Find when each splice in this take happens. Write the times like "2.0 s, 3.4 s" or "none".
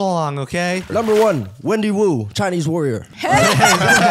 0.9 s, 3.1 s